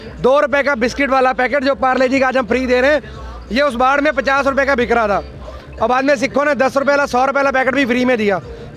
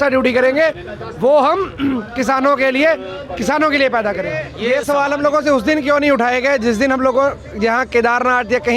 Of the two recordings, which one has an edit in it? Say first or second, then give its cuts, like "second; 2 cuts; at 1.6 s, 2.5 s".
second; 1 cut; at 4.5 s